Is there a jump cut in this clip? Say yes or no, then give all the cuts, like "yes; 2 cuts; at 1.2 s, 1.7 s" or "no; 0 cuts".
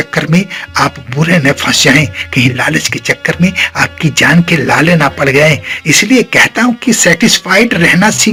no; 0 cuts